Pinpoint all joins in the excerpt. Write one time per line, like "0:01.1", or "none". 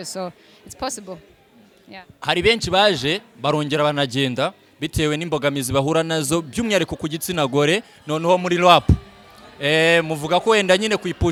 none